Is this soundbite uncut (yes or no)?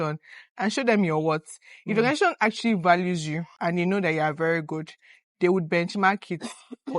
no